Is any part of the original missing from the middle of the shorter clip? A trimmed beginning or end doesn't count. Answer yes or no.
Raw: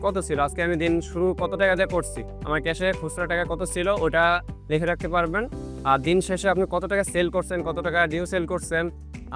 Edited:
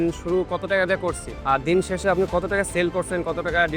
yes